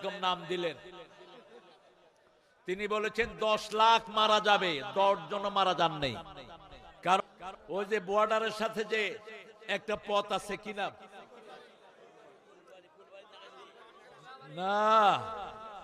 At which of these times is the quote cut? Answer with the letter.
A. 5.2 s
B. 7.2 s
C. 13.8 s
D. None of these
B